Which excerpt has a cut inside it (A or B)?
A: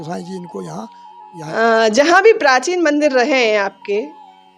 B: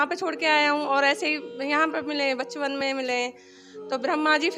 A